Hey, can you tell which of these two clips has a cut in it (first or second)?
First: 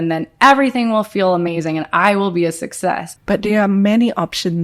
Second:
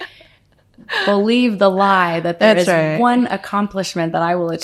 first